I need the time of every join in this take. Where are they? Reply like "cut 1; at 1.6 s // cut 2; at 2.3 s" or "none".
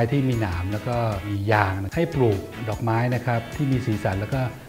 cut 1; at 1.9 s